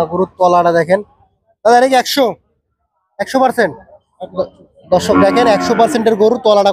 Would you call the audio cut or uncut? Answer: uncut